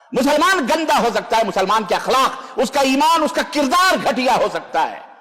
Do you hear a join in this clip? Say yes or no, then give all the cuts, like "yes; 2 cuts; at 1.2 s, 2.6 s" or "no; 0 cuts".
no; 0 cuts